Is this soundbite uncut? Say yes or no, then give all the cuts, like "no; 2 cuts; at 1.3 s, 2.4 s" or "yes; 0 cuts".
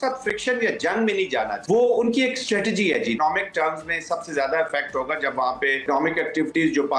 no; 3 cuts; at 1.6 s, 3.2 s, 5.8 s